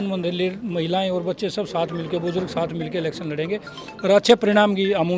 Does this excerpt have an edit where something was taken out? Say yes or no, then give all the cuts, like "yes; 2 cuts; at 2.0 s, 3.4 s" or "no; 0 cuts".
no; 0 cuts